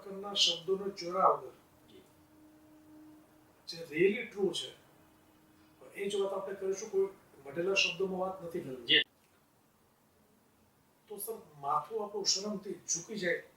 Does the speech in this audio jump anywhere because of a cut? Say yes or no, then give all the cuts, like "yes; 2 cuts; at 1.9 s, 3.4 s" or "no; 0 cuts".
no; 0 cuts